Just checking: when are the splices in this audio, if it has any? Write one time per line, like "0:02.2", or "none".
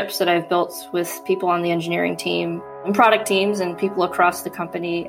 0:02.8